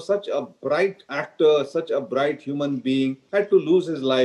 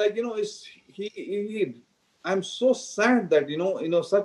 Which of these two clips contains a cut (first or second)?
first